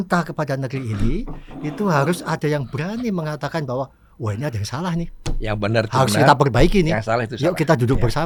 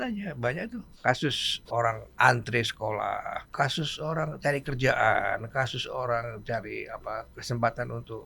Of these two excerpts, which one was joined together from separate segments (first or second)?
second